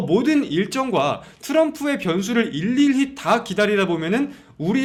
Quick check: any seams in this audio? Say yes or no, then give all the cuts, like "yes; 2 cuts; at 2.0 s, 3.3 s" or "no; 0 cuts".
no; 0 cuts